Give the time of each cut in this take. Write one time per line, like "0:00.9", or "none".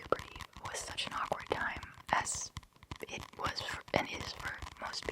none